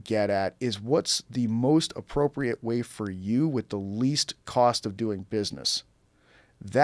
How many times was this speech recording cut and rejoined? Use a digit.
0